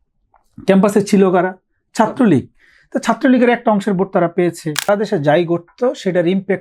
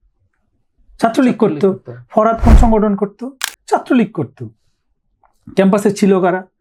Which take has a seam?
first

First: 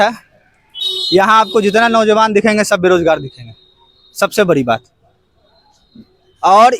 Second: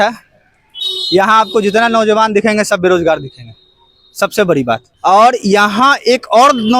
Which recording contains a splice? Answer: second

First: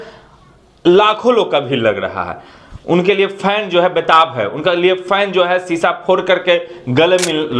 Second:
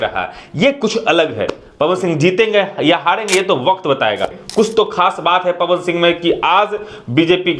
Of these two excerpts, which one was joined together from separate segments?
second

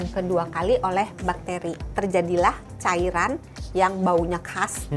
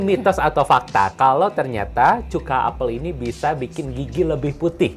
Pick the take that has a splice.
first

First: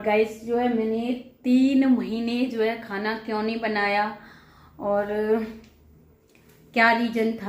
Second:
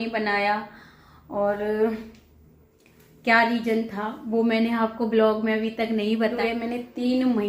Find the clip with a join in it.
second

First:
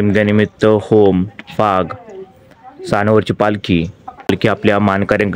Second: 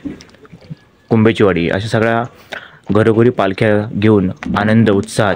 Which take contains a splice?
first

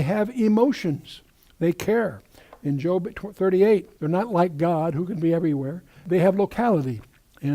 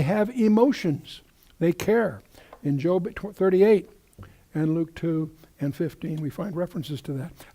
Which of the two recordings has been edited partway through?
second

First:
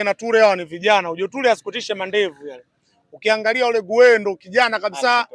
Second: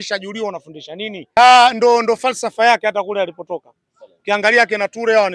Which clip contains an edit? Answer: second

